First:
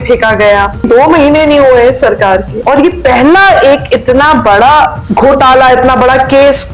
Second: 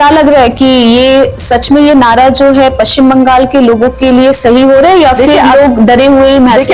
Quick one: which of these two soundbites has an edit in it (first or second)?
first